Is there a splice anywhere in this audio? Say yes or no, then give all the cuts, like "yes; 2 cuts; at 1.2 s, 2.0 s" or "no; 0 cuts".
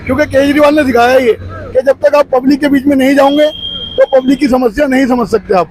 no; 0 cuts